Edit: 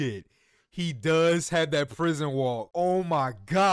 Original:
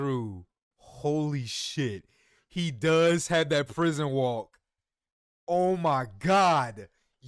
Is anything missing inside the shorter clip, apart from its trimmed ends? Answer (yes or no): yes